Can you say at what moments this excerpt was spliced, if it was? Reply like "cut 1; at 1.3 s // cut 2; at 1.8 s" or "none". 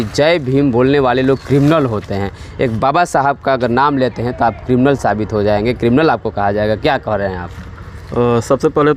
none